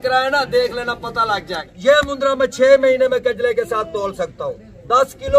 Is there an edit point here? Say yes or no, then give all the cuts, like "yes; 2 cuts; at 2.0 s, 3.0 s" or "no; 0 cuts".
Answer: yes; 1 cut; at 1.7 s